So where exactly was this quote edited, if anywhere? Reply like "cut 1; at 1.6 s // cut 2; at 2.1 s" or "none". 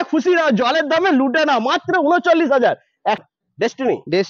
cut 1; at 3.2 s